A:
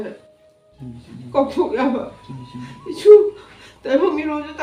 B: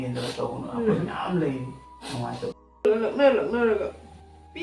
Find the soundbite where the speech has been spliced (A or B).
B